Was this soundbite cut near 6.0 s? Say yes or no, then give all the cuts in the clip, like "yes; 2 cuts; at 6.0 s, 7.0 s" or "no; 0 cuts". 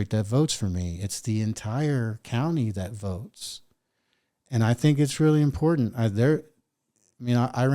no; 0 cuts